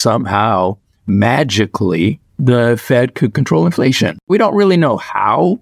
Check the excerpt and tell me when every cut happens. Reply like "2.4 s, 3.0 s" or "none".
4.2 s

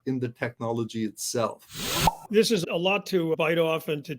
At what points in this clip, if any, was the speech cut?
2.1 s

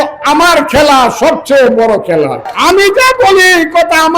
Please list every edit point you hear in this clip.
2.5 s

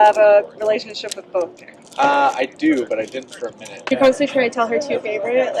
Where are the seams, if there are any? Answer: 3.7 s

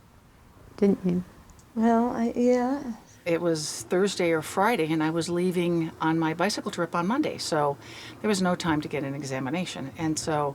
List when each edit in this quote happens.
3.2 s

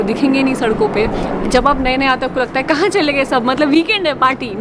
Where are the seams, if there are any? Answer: none

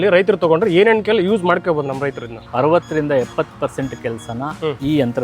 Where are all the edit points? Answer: 2.4 s

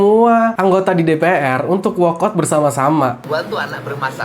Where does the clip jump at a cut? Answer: 3.2 s

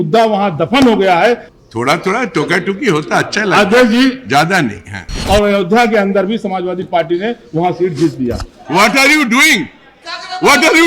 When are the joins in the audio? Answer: 1.5 s, 5.2 s, 8.5 s

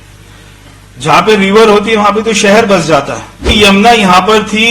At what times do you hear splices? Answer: 3.4 s

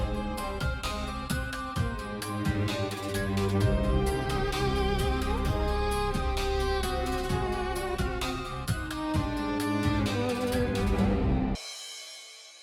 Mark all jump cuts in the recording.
11.6 s

